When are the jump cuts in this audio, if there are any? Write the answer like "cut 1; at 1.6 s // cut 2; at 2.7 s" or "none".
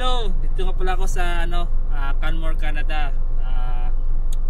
none